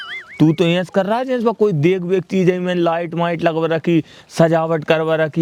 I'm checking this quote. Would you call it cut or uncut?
uncut